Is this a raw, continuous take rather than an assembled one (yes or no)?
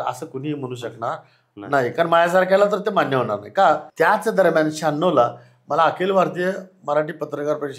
no